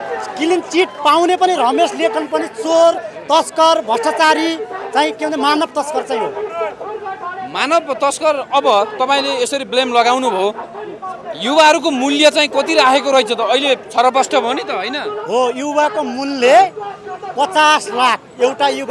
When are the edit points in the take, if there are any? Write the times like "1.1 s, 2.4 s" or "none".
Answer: none